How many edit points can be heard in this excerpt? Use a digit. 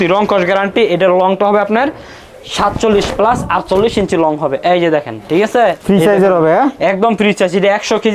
0